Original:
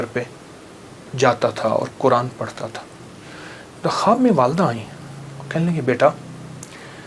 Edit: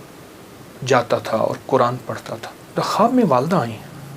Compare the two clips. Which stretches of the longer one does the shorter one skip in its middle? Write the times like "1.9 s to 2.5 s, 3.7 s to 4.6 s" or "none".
3.4 s to 4.1 s